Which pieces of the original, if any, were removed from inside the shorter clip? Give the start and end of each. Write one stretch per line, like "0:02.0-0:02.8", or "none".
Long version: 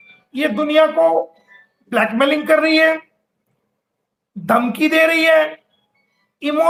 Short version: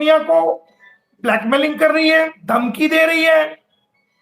0:03.1-0:04.4